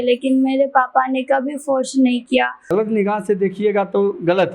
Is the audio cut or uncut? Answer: cut